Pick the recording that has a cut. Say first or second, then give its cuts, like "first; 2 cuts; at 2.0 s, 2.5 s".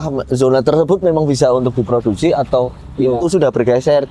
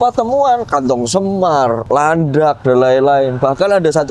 second; 1 cut; at 1.8 s